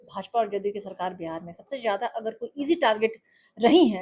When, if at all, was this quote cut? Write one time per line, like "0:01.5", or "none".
none

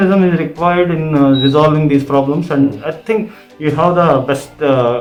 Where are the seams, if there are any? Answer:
none

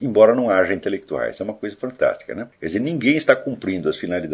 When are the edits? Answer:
0:02.5

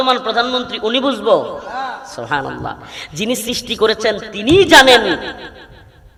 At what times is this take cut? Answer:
none

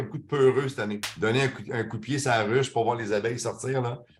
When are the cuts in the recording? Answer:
0:01.1

